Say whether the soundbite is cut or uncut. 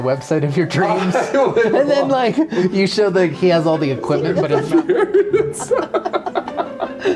cut